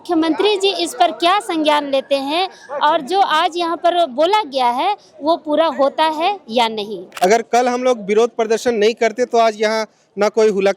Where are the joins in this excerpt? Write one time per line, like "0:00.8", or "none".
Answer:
0:07.0